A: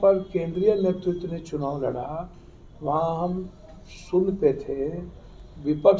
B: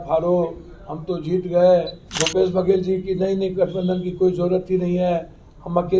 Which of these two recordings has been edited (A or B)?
B